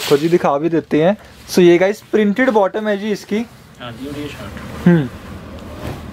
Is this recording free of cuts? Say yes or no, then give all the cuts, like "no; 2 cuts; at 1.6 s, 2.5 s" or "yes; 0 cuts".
yes; 0 cuts